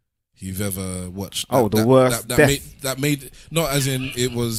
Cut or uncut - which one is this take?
uncut